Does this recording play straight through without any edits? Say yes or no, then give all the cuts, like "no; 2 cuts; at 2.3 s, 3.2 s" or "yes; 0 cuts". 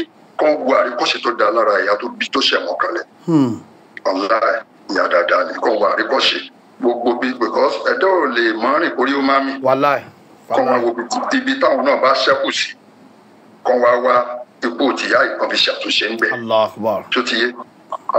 yes; 0 cuts